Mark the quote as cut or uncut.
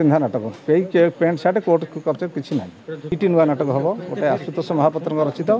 cut